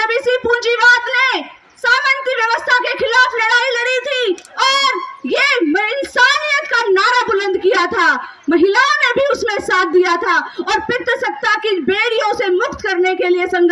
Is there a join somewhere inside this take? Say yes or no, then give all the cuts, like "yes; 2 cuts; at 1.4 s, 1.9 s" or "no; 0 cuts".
no; 0 cuts